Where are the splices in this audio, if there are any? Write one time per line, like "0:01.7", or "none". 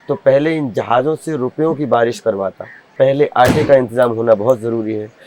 0:02.9